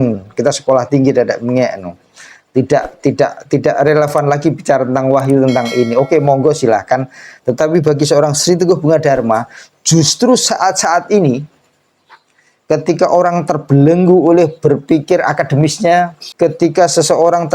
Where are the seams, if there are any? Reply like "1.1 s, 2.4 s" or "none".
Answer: 16.2 s